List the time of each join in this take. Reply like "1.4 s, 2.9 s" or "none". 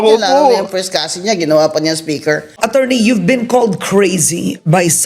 2.5 s